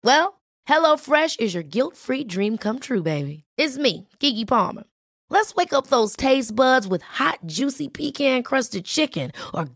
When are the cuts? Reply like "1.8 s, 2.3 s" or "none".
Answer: none